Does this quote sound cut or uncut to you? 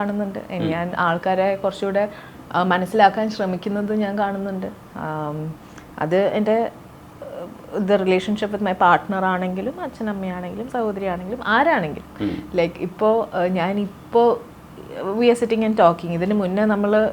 uncut